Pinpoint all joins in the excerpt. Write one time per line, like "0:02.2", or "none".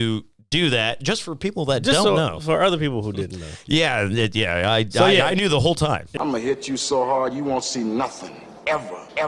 0:06.1